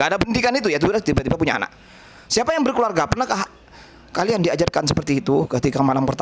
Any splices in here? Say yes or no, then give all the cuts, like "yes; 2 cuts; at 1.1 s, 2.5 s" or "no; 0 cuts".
no; 0 cuts